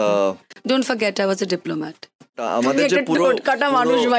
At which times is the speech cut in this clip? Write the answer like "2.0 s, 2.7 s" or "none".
2.4 s